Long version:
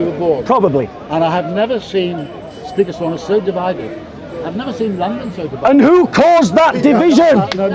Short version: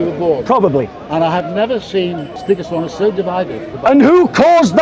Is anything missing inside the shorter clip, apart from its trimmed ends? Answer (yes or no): yes